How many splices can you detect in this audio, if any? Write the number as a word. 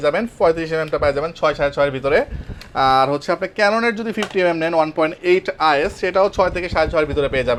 zero